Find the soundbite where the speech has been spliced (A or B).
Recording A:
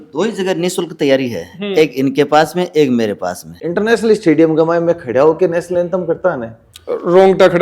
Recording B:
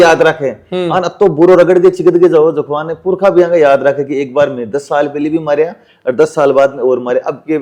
A